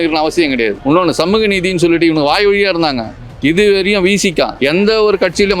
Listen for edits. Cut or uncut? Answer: uncut